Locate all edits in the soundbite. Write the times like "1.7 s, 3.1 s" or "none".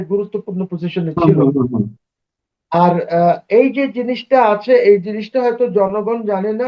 none

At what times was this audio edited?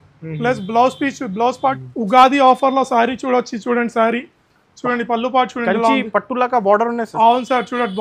1.8 s

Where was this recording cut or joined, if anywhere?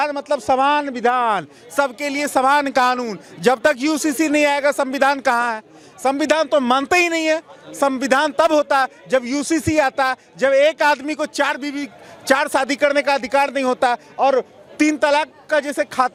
none

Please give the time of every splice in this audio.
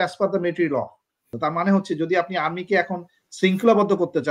1.3 s

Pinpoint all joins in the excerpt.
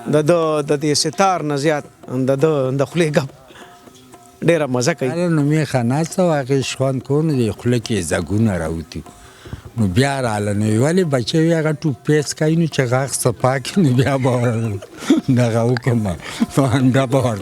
5.1 s

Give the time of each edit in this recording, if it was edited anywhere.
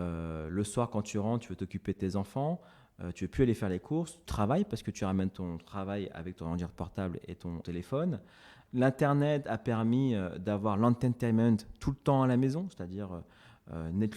4.2 s, 7.7 s, 8.6 s

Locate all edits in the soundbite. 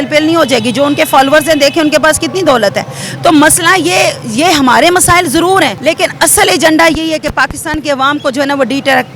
5.8 s

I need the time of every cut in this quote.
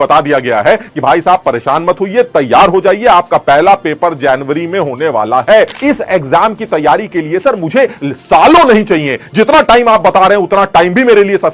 5.8 s

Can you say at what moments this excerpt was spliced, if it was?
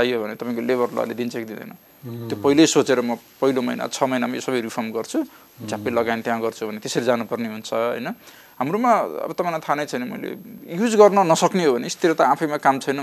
10.5 s

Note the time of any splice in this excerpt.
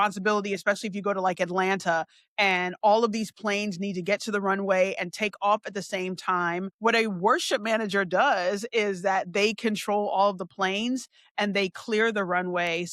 6.7 s

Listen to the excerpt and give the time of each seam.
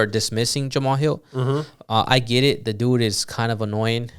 none

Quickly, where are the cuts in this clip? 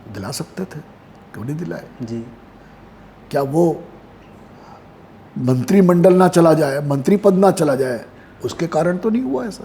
none

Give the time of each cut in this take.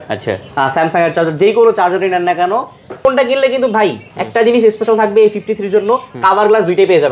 3.0 s

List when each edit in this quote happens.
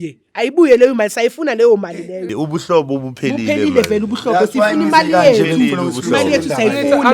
2.2 s

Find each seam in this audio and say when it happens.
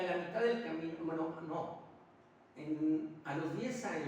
none

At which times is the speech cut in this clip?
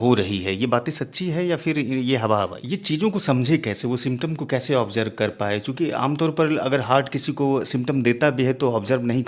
2.6 s

